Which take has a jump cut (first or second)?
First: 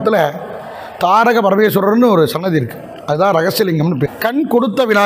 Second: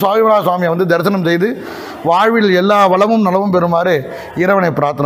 first